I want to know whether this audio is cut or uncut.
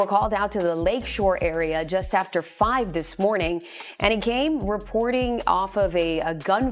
uncut